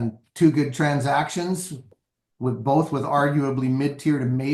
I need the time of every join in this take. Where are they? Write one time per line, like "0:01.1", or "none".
0:01.9